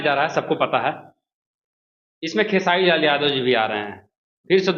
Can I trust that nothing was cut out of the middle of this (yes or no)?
no